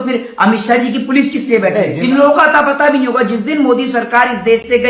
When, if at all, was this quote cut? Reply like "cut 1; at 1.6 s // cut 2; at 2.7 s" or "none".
cut 1; at 1.9 s